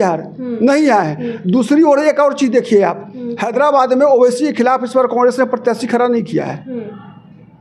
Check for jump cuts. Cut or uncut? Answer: uncut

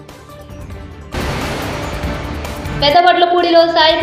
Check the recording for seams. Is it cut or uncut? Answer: cut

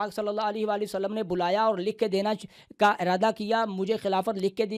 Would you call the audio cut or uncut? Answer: uncut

